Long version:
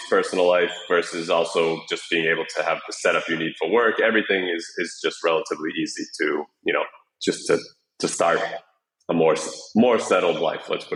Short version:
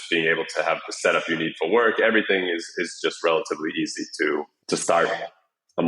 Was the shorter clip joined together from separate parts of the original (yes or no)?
yes